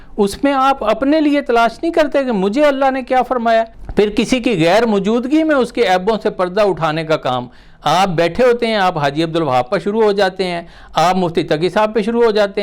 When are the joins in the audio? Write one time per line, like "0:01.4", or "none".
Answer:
0:03.8